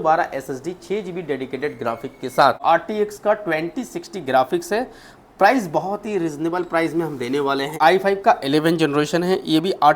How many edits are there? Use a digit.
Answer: 2